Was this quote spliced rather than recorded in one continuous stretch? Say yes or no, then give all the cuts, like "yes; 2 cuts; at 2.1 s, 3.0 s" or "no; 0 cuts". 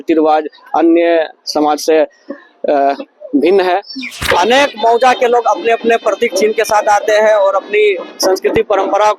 yes; 1 cut; at 4.1 s